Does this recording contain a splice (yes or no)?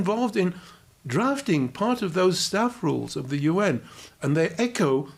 no